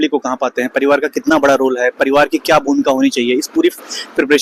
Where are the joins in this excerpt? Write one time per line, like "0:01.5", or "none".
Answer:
none

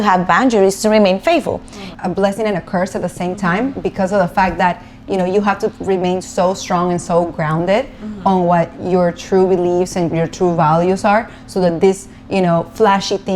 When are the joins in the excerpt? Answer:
0:01.9

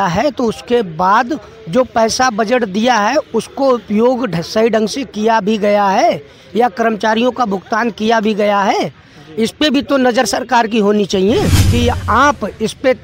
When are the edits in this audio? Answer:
0:11.6

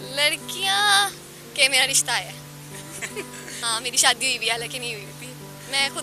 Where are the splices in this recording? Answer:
0:03.6

